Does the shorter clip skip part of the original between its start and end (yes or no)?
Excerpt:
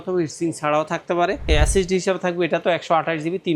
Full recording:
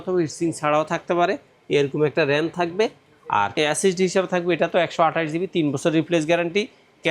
yes